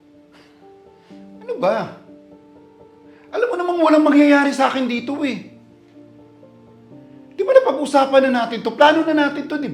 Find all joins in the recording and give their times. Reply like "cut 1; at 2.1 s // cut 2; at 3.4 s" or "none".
cut 1; at 0.9 s // cut 2; at 2.0 s // cut 3; at 3.3 s